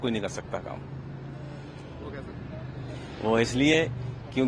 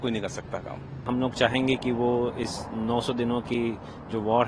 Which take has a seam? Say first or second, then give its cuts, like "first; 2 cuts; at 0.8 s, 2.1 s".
second; 1 cut; at 1.1 s